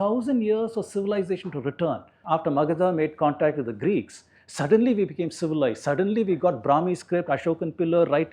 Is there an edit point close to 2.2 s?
yes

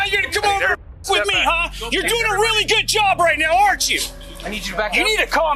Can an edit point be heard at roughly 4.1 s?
no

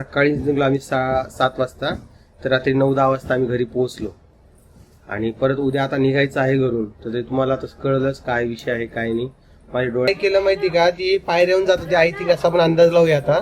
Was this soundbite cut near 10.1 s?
yes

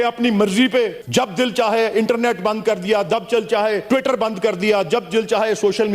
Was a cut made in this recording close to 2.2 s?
no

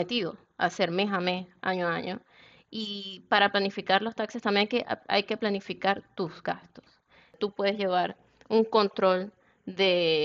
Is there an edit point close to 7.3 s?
yes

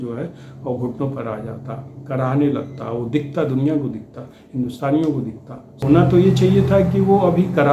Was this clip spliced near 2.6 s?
no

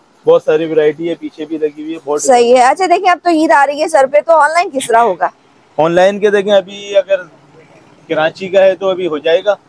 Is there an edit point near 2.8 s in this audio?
no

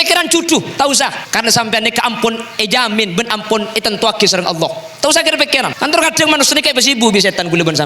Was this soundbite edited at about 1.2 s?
yes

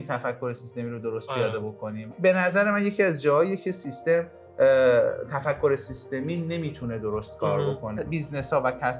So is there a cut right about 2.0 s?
yes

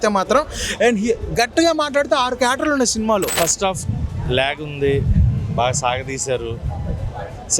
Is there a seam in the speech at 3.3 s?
yes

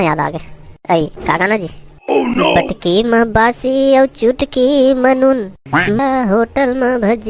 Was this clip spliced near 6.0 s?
yes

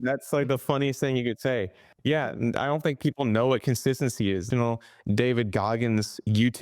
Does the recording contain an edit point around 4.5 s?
yes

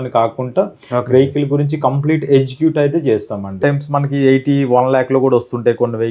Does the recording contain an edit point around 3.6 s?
yes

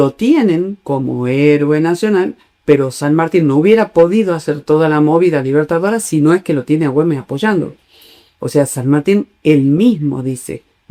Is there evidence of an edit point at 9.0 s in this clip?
no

